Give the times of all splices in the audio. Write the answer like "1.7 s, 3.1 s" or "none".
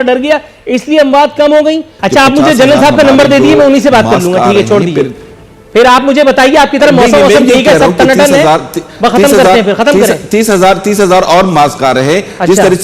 1.9 s